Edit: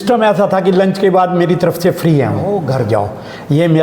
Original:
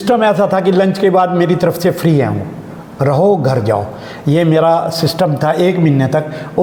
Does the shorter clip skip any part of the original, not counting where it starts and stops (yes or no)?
yes